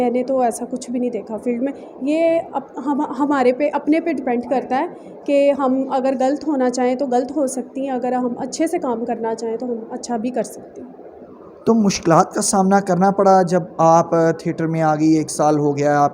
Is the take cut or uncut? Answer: uncut